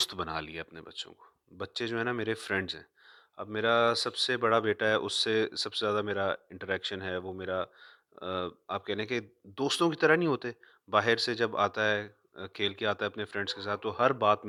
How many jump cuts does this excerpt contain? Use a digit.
0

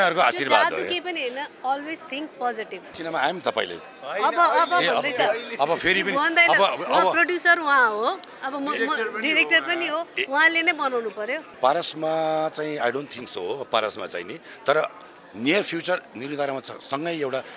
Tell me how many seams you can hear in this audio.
2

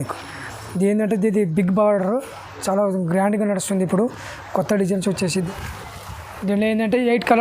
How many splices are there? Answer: 1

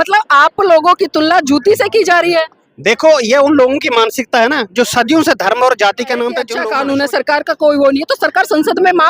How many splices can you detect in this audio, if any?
1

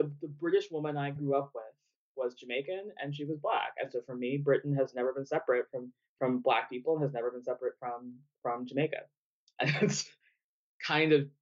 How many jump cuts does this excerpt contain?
1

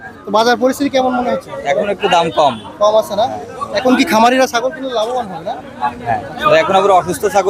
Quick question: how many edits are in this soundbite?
0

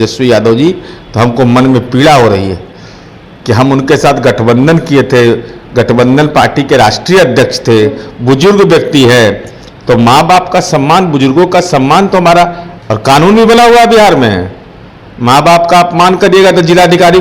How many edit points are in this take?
0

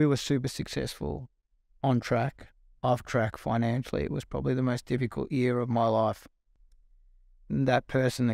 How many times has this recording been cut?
0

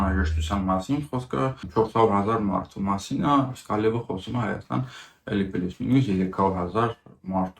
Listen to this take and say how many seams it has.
1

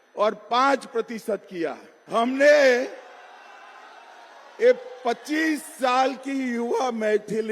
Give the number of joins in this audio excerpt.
1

